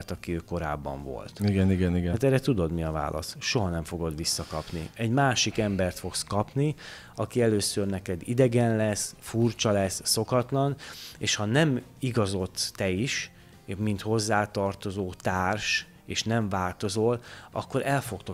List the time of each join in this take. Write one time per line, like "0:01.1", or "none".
none